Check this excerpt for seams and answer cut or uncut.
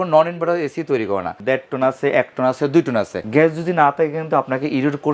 cut